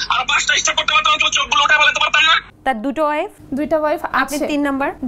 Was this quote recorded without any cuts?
no; 1 cut; at 2.4 s

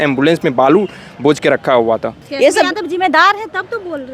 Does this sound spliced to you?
yes; 1 cut; at 2.2 s

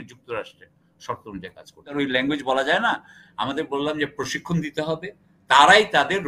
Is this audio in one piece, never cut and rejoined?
no; 1 cut; at 1.9 s

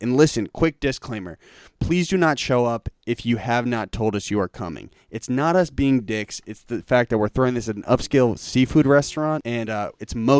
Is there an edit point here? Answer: yes; 1 cut; at 9.5 s

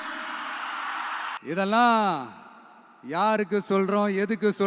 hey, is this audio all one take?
no; 1 cut; at 1.4 s

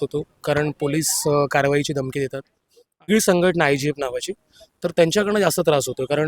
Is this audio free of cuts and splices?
no; 1 cut; at 3.1 s

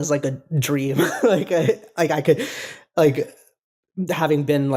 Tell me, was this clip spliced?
no; 0 cuts

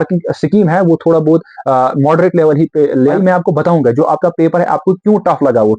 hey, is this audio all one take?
no; 1 cut; at 3.1 s

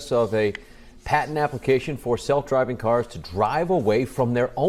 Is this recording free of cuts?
yes; 0 cuts

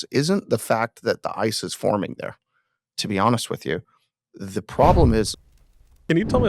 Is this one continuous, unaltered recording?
no; 1 cut; at 5.4 s

